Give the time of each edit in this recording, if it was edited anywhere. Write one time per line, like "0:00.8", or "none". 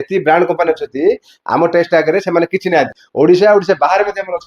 0:03.0